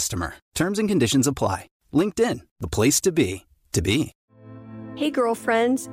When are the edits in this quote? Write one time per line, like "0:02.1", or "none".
0:04.2